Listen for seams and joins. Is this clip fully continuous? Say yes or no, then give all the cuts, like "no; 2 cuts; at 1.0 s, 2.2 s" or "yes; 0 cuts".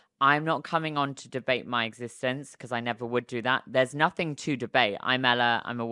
yes; 0 cuts